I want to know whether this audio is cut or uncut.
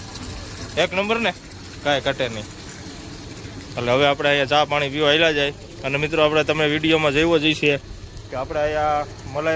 uncut